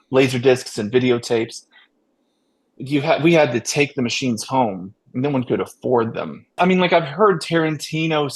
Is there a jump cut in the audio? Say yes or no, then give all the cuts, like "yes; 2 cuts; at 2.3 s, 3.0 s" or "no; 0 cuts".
yes; 1 cut; at 6.5 s